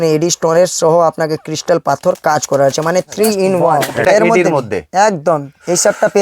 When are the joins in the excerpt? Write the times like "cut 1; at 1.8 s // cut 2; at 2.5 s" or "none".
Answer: cut 1; at 3.9 s